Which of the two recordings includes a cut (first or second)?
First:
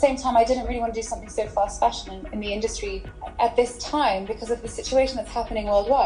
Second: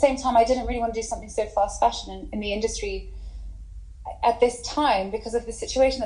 first